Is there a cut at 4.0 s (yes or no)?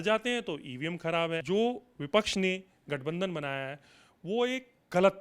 no